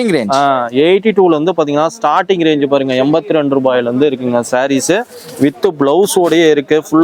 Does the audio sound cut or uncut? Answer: uncut